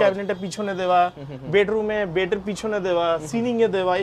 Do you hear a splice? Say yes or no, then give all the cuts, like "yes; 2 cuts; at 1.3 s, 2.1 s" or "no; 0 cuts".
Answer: no; 0 cuts